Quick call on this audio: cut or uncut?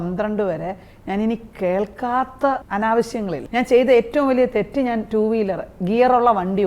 cut